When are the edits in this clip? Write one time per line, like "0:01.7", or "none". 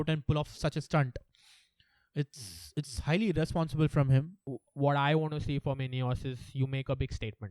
0:04.4